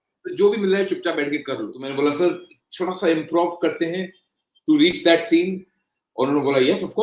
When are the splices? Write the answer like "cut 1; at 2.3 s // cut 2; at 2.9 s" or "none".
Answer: cut 1; at 1.8 s